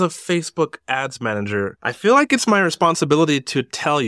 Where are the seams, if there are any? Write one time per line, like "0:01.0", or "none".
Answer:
0:01.8